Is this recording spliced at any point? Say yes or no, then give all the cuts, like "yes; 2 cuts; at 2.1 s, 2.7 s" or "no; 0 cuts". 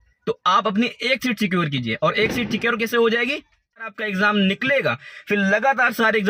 yes; 1 cut; at 3.8 s